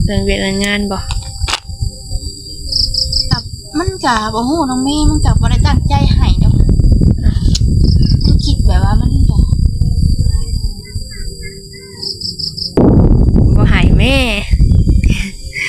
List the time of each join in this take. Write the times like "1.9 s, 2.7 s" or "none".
12.8 s